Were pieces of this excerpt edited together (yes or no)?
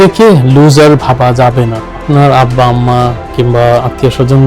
yes